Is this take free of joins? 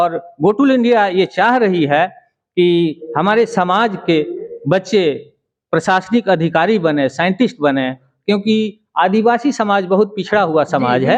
yes; 0 cuts

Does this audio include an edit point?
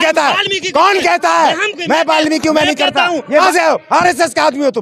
yes; 1 cut; at 3.4 s

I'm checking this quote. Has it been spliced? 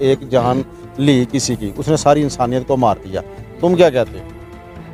no; 0 cuts

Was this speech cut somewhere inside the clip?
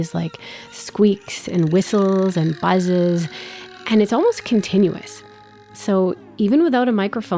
no; 0 cuts

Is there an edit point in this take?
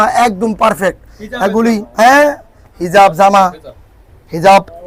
no; 0 cuts

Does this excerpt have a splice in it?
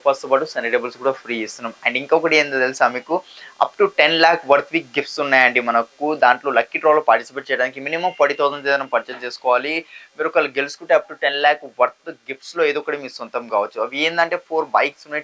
no; 0 cuts

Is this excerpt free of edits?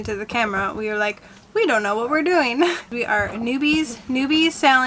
no; 1 cut; at 2.9 s

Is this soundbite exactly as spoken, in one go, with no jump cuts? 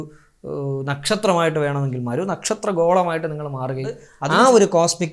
no; 1 cut; at 4.1 s

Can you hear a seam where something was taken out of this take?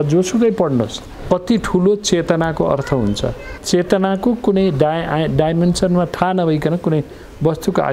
yes; 2 cuts; at 1.1 s, 3.5 s

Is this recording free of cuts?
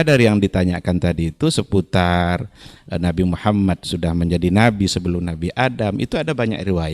yes; 0 cuts

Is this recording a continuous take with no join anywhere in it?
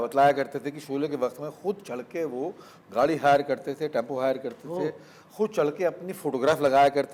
yes; 0 cuts

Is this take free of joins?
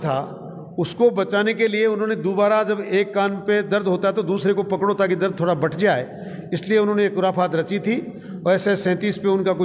yes; 0 cuts

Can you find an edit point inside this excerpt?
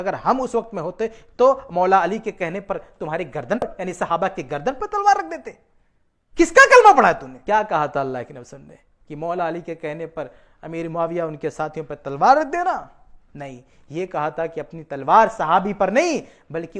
yes; 2 cuts; at 3.6 s, 7.3 s

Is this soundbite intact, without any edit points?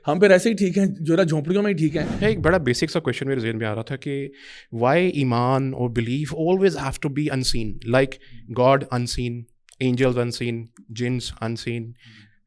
no; 1 cut; at 2.1 s

